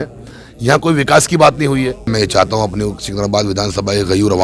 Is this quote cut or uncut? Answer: cut